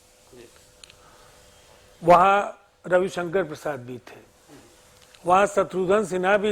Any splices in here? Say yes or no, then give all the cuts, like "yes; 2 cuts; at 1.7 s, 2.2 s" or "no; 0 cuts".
no; 0 cuts